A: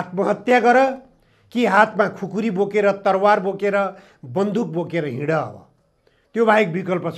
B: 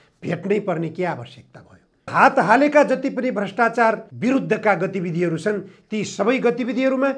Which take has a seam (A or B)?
B